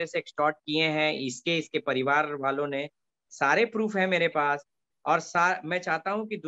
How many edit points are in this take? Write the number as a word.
zero